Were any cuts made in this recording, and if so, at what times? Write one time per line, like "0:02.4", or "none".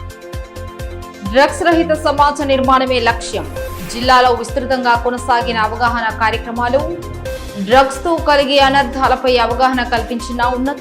0:00.9

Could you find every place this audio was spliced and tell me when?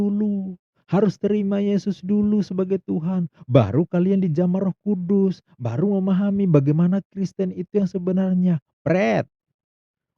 none

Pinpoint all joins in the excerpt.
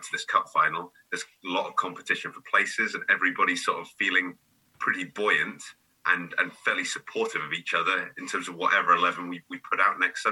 none

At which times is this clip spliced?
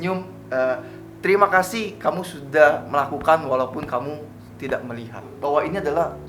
0:05.3

